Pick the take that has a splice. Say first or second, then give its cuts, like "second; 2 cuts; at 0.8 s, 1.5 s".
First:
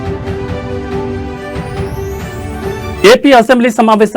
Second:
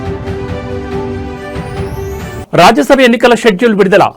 second; 1 cut; at 2.4 s